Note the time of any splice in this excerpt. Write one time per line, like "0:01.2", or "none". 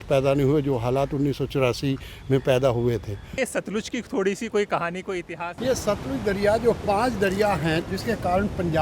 0:03.4
0:05.5
0:07.9